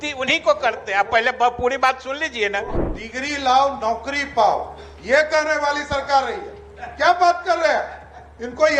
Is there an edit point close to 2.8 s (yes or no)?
yes